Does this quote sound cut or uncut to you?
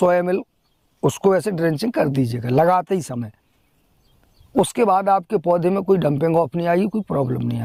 uncut